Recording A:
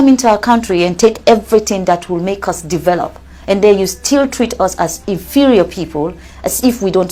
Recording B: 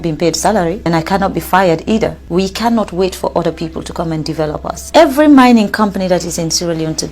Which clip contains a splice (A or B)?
B